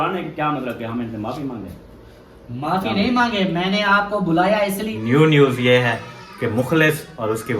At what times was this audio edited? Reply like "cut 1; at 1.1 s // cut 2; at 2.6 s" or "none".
cut 1; at 4.9 s